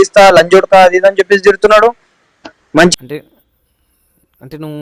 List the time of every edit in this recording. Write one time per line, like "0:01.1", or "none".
0:02.9